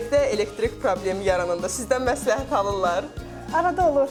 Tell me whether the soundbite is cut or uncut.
uncut